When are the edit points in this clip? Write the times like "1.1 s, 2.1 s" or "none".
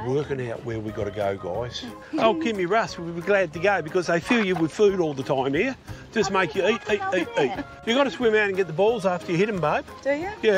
1.9 s, 7.7 s